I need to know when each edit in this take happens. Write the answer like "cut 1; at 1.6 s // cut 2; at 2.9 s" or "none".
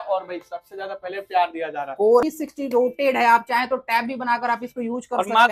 cut 1; at 2.2 s